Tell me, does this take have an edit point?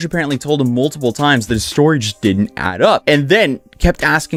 no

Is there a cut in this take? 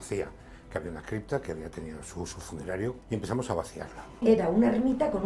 no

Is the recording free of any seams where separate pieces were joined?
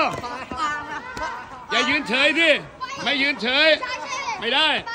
yes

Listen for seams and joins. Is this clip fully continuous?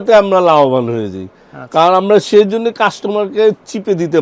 yes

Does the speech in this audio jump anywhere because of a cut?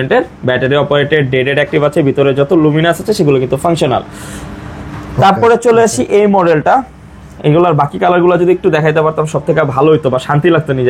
no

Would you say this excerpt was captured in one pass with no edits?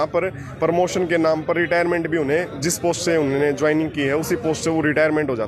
yes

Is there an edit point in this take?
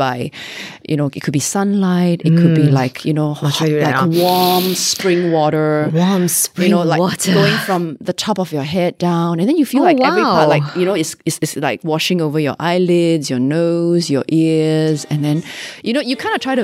no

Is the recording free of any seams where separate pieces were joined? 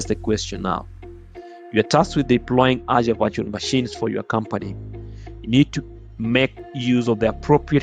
yes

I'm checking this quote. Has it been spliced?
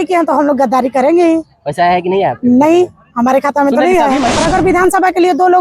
yes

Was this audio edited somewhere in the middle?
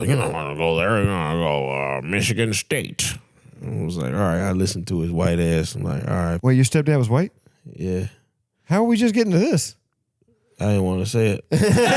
yes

